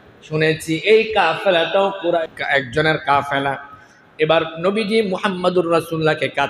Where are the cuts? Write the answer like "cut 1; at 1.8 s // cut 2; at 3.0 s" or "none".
cut 1; at 2.2 s